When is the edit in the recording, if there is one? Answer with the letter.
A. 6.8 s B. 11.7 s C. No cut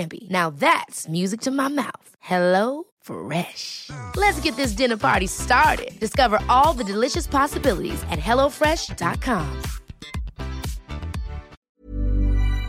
B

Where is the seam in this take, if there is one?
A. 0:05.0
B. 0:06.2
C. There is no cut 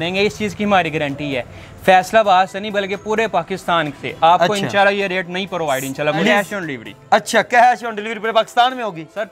B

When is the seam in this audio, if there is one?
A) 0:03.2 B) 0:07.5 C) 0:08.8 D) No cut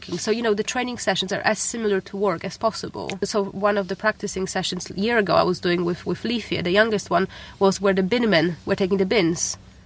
A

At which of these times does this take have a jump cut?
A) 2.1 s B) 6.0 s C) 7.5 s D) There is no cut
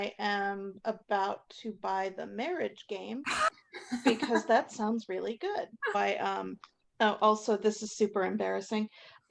B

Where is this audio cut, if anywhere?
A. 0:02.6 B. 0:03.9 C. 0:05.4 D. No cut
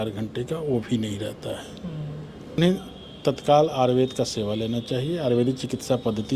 A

